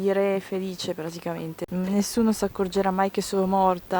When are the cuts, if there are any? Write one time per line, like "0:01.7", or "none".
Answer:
0:01.6